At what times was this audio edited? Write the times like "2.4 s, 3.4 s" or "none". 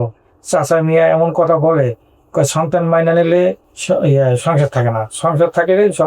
3.7 s